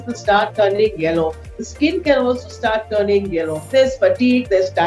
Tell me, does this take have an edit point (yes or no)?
yes